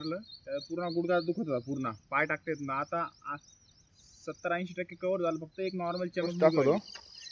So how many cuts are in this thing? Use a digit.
1